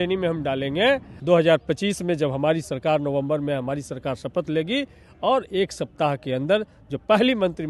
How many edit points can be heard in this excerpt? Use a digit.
1